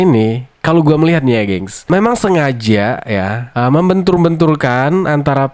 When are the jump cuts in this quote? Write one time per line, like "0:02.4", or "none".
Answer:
none